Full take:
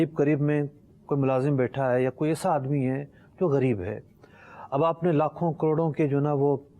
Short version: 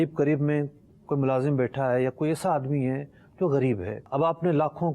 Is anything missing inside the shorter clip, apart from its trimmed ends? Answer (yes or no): yes